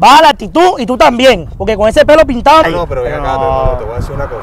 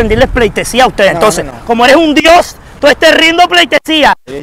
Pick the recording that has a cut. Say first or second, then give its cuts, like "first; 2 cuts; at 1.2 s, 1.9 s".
first; 1 cut; at 2.6 s